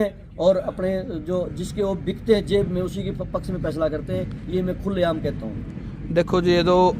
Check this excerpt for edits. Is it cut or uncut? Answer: uncut